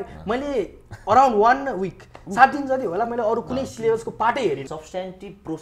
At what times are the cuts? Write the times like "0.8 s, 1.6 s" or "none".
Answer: 4.6 s